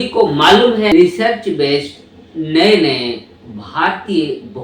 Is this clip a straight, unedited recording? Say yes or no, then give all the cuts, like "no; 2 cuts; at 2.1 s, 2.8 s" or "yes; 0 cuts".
no; 1 cut; at 0.9 s